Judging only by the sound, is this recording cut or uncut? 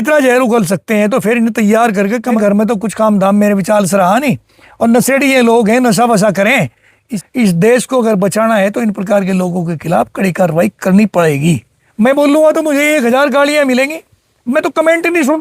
cut